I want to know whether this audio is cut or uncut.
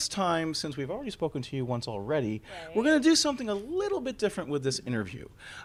uncut